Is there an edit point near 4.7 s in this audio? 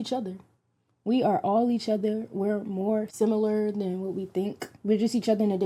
yes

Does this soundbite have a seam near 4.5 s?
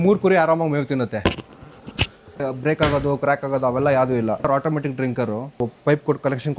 yes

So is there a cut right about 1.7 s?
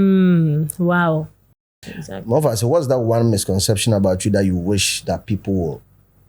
yes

